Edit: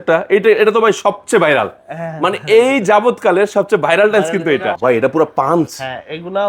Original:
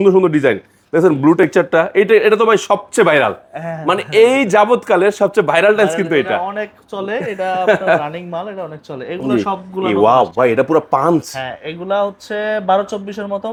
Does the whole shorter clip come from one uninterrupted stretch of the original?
no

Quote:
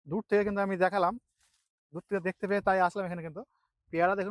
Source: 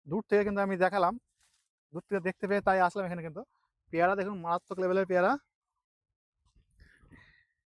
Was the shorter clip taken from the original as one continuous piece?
yes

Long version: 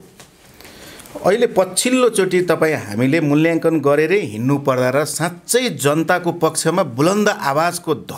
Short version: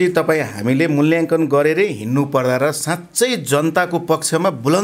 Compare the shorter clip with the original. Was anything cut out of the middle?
no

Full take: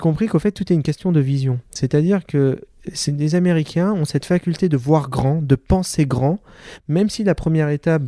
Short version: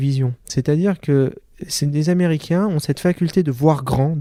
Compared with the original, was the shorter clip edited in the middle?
no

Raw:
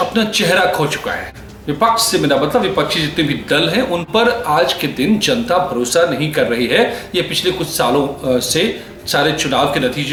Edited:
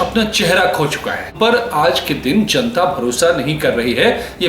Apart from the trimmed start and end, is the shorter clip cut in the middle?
yes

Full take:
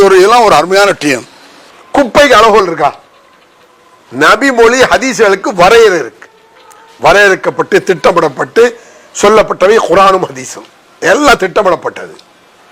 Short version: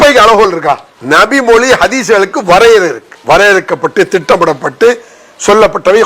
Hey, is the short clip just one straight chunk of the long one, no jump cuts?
no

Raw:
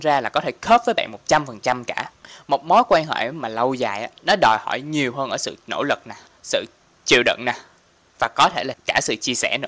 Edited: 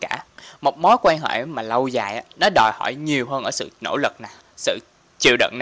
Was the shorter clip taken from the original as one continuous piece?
yes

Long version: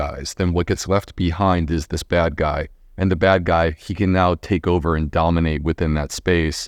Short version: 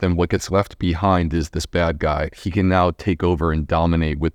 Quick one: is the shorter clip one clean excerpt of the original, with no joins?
no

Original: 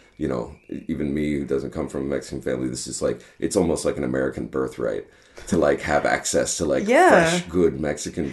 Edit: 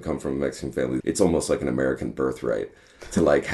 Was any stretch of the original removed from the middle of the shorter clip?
yes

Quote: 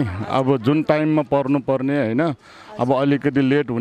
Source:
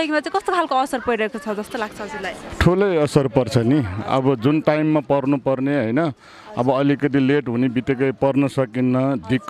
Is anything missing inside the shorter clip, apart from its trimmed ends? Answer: no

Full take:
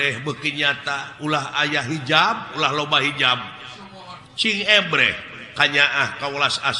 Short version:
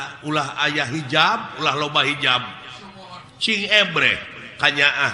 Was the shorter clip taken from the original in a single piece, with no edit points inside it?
yes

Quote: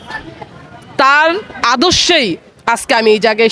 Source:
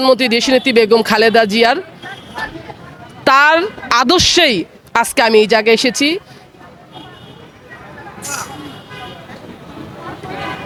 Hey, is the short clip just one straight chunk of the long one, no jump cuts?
yes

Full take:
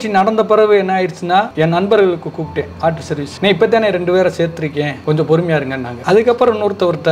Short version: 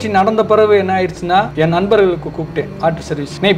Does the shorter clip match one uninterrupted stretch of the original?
yes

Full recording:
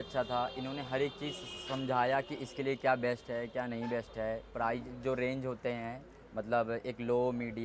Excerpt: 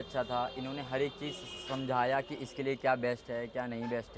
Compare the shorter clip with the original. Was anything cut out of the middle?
no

